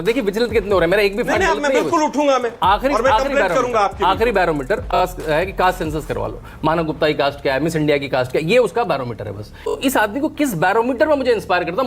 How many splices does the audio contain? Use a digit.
2